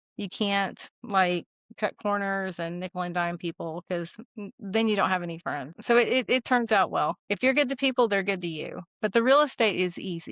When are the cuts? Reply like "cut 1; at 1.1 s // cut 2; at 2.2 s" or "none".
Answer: cut 1; at 5.7 s // cut 2; at 7.2 s

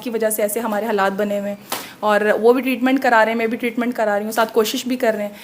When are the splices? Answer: none

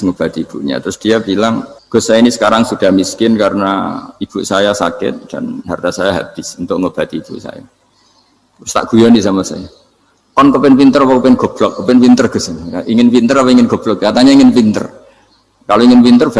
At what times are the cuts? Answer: cut 1; at 1.7 s

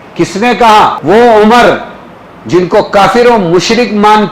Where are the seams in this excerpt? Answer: cut 1; at 1.0 s

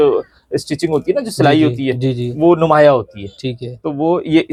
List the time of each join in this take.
none

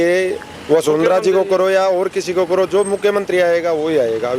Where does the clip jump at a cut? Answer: none

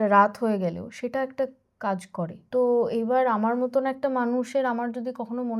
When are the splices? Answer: cut 1; at 2.4 s

